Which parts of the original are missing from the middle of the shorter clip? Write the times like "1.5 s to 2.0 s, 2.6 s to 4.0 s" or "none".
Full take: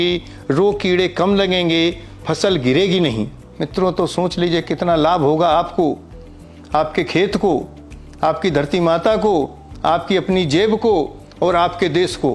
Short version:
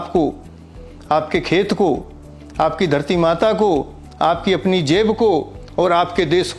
none